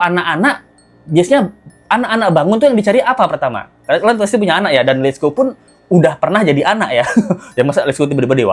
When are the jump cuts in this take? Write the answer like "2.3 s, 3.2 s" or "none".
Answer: none